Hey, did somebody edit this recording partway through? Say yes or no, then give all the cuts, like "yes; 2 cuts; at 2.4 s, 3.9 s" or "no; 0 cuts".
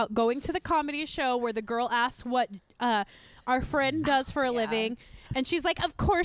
no; 0 cuts